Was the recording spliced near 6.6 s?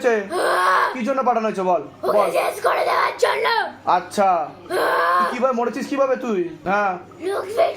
yes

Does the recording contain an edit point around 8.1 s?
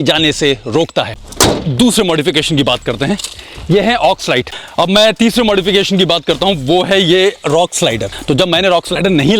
yes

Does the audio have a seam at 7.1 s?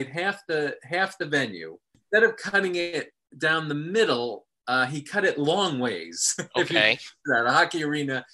no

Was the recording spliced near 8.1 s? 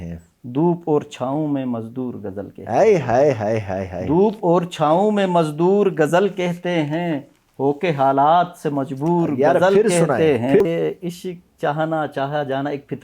no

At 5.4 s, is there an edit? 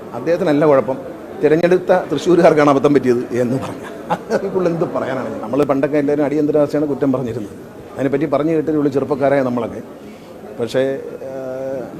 yes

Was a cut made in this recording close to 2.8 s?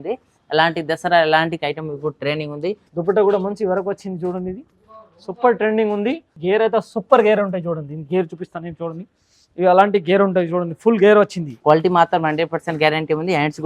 yes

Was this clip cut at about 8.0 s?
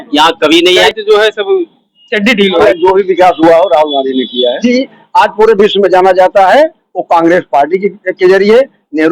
no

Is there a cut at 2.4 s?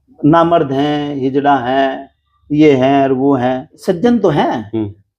no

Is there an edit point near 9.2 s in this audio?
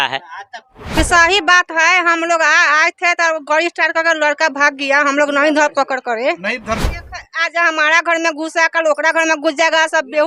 no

